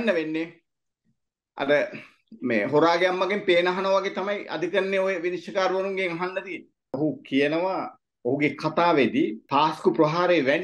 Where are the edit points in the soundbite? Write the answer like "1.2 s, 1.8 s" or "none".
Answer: 6.9 s, 9.4 s